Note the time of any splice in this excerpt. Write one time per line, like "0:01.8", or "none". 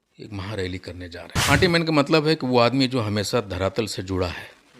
0:01.4